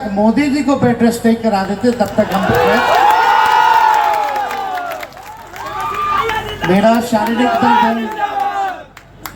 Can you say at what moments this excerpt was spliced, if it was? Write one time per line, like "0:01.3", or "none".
none